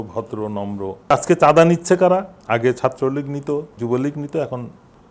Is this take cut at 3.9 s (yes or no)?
no